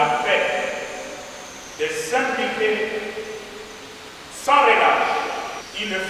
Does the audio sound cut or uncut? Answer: uncut